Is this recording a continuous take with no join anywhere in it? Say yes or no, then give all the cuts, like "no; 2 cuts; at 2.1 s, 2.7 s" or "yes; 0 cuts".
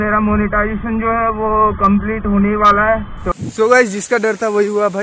no; 1 cut; at 3.3 s